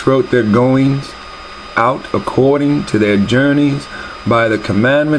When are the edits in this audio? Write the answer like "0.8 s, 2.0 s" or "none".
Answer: none